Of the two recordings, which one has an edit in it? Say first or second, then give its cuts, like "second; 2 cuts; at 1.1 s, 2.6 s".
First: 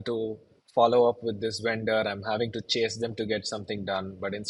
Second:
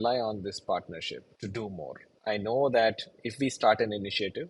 second; 2 cuts; at 1.3 s, 2.1 s